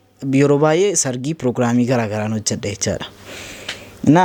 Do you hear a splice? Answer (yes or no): no